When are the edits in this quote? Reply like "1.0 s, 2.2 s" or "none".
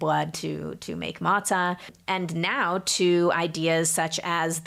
2.0 s